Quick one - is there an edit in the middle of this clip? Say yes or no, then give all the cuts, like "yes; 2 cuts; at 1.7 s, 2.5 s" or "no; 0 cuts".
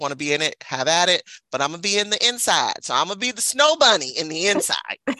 no; 0 cuts